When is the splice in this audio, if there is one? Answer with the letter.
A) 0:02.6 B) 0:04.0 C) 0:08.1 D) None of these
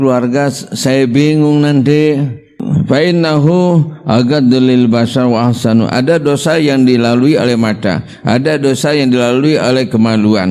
A